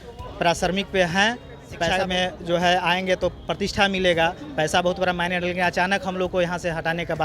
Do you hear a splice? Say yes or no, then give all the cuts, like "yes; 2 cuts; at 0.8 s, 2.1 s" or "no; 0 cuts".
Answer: yes; 1 cut; at 1.9 s